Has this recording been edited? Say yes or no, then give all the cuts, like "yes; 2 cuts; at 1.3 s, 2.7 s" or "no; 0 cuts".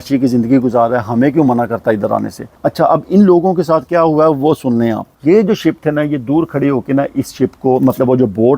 yes; 2 cuts; at 2.4 s, 5.0 s